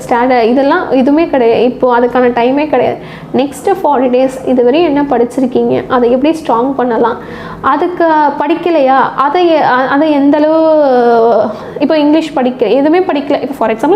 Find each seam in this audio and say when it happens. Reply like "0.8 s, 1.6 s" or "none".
none